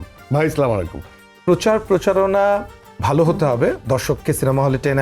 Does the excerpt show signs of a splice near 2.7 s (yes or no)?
no